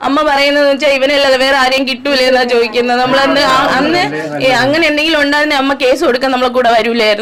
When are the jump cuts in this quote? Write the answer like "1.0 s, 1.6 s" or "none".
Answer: none